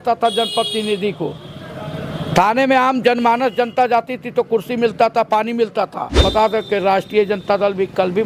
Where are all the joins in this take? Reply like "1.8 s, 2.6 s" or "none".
6.2 s